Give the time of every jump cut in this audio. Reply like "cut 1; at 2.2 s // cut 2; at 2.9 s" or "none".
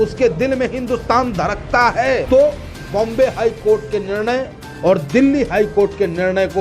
cut 1; at 2.2 s